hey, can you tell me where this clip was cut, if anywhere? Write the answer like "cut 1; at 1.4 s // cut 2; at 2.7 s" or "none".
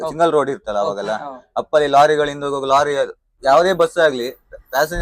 cut 1; at 3.3 s